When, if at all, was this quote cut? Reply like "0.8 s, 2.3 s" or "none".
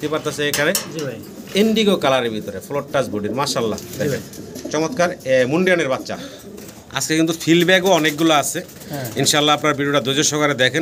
6.1 s